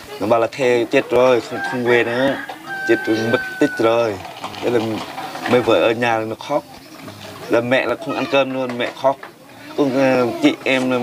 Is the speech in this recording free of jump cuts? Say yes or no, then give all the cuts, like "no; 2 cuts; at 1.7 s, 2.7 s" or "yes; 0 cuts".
yes; 0 cuts